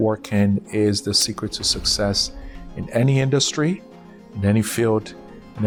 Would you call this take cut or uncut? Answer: uncut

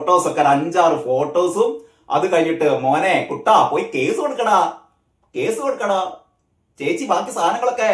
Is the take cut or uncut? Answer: uncut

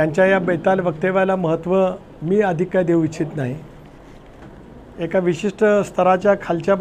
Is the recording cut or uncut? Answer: uncut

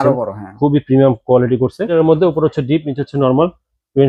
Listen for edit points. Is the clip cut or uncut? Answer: cut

